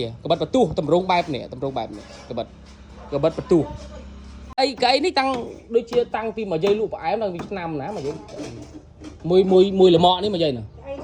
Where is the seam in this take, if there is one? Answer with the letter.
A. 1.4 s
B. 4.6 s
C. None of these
B